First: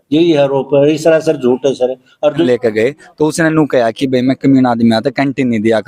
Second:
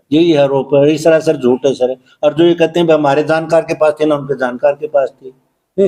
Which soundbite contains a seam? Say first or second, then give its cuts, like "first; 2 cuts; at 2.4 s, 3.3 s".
first; 1 cut; at 2.4 s